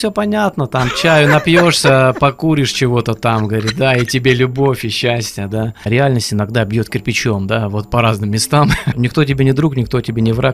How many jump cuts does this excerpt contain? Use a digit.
2